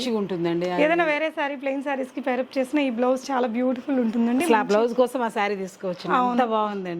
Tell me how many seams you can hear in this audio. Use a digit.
0